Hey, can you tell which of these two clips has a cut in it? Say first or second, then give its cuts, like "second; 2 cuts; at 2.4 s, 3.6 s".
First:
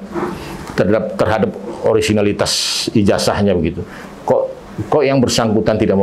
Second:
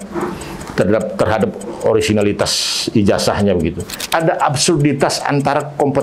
second; 1 cut; at 3.9 s